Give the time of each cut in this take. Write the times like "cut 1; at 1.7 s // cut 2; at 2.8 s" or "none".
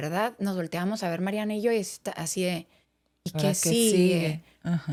none